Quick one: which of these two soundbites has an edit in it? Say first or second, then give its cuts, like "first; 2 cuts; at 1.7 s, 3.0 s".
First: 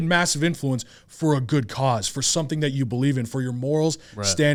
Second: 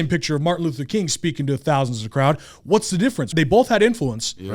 second; 1 cut; at 3.3 s